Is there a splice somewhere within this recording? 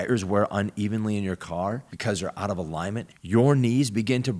no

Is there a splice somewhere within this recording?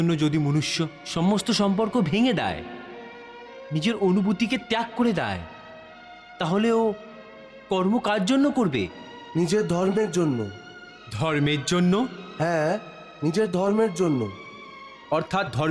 no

